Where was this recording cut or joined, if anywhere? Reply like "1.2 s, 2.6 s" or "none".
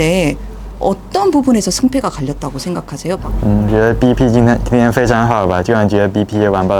3.2 s